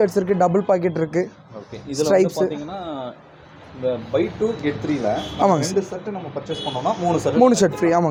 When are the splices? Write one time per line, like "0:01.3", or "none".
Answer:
none